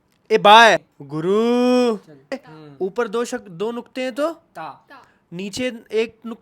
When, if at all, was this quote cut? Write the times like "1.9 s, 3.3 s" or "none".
1.0 s, 2.3 s

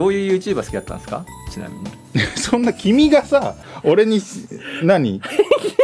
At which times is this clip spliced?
none

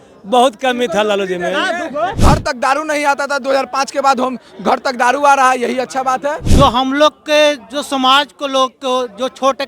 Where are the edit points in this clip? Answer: 2.2 s, 6.4 s

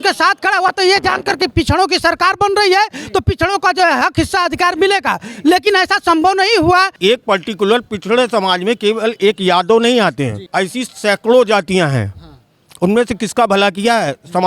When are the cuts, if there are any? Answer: 6.9 s, 10.4 s

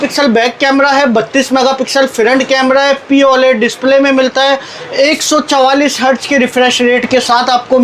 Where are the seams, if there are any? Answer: none

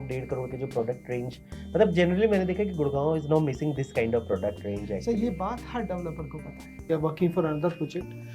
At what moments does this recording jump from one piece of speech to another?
6.9 s

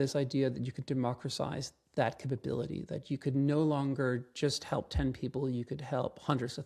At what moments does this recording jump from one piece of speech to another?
none

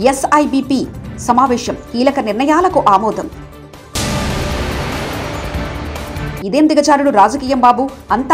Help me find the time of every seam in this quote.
none

